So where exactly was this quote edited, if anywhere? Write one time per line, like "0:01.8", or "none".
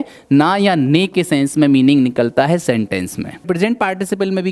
0:03.4